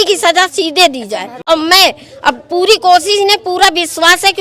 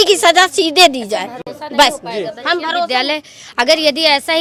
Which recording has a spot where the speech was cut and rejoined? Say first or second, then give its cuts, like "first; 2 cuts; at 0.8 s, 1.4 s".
first; 1 cut; at 1.4 s